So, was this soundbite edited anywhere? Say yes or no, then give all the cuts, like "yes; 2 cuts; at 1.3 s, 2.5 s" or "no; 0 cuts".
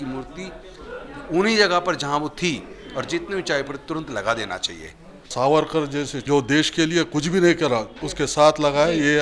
yes; 3 cuts; at 5.3 s, 6.2 s, 8.0 s